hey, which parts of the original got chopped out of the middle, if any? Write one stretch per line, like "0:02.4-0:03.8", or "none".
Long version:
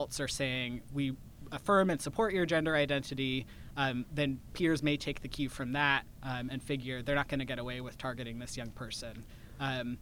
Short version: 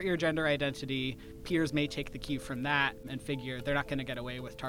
0:03.6-0:04.5
0:06.1-0:06.5